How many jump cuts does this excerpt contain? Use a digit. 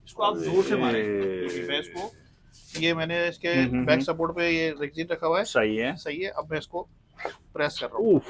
0